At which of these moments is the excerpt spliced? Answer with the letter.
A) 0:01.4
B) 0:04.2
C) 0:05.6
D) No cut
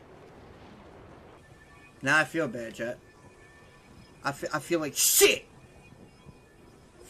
A